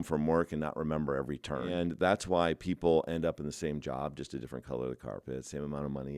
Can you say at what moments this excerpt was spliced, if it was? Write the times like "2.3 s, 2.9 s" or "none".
1.7 s

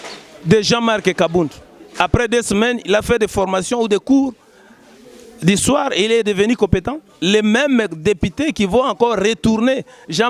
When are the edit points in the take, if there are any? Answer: none

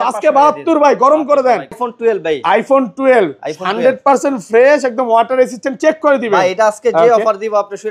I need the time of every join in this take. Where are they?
1.9 s

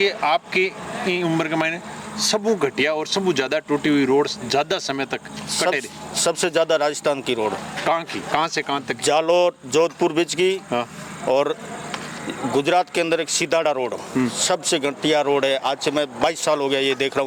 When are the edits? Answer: none

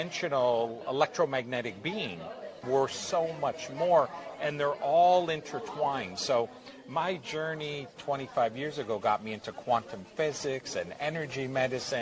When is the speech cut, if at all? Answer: 2.6 s

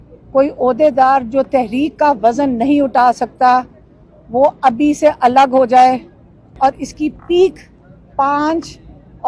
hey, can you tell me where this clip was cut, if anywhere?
6.6 s

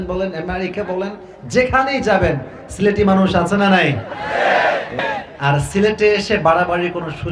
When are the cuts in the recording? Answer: 5.0 s

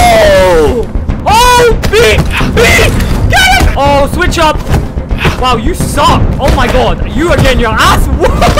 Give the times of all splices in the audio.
1.1 s, 3.7 s, 6.3 s

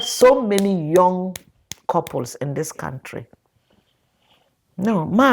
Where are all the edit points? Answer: none

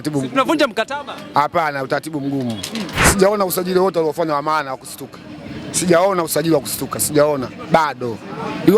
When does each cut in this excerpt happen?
3.0 s

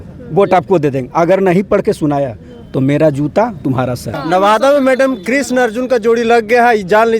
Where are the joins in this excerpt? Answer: 4.2 s

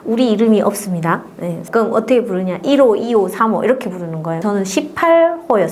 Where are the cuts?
1.6 s, 4.4 s

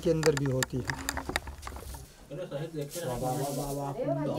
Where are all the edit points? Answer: 1.9 s

